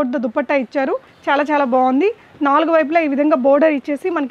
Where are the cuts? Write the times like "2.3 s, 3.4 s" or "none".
1.1 s